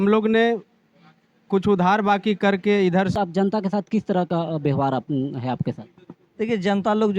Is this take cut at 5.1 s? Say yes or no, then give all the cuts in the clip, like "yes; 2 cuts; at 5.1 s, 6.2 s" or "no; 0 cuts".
no; 1 cut; at 3.1 s